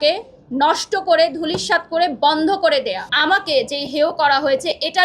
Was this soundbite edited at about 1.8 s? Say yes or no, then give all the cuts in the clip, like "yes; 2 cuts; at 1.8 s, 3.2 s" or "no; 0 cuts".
no; 1 cut; at 3.1 s